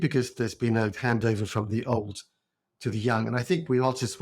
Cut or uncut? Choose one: uncut